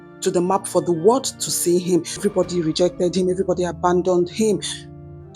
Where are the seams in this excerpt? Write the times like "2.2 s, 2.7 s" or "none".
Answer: 2.2 s